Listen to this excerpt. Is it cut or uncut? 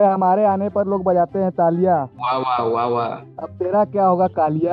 uncut